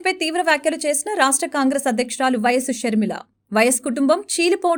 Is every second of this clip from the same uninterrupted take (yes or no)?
yes